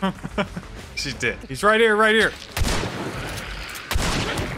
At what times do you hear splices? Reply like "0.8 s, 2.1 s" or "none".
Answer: 1.5 s